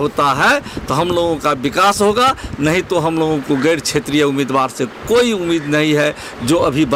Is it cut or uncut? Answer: uncut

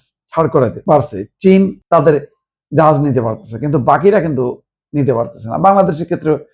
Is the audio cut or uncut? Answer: uncut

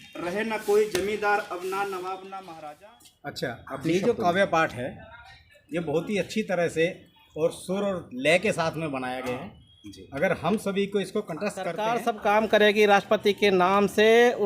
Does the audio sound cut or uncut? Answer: cut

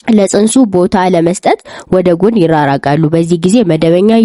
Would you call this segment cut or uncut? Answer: uncut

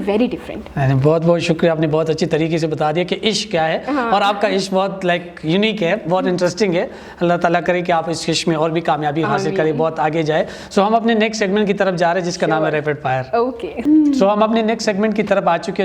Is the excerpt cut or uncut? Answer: uncut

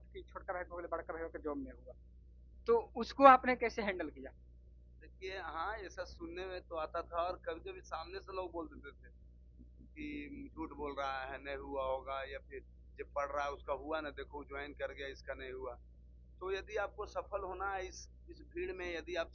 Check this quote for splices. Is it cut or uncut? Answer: uncut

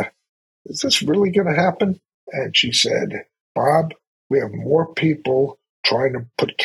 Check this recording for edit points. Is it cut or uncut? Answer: cut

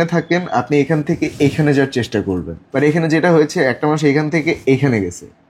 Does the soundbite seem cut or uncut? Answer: cut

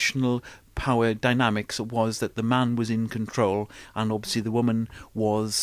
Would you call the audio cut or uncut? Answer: cut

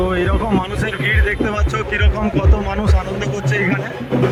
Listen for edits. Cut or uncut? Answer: uncut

